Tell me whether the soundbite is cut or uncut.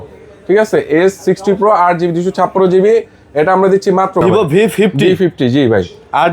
cut